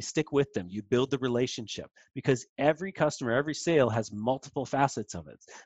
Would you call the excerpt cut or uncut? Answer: uncut